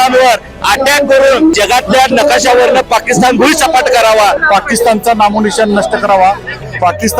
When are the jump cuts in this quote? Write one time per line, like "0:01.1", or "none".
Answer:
0:04.4

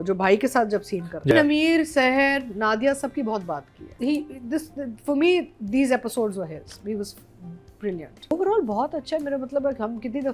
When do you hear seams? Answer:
0:01.3
0:03.9
0:08.3

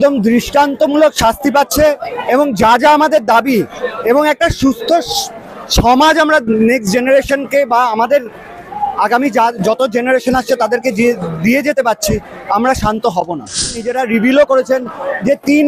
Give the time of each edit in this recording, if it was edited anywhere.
0:13.9

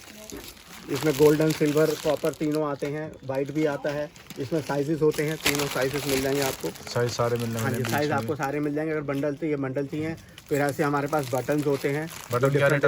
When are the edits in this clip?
none

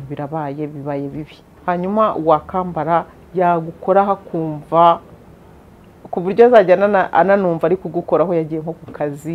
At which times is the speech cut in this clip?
0:01.5

